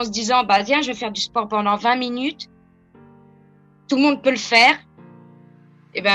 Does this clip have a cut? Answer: yes; 2 cuts; at 2.4 s, 3.8 s

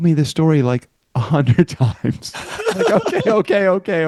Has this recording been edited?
no; 0 cuts

